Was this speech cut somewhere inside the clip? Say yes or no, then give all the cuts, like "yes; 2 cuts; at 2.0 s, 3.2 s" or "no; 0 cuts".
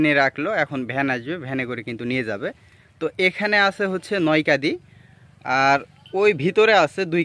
no; 0 cuts